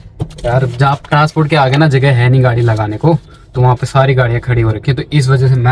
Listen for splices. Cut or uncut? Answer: uncut